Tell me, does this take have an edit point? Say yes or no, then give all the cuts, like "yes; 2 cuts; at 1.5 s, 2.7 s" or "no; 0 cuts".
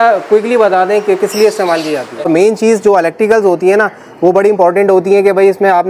yes; 1 cut; at 2.3 s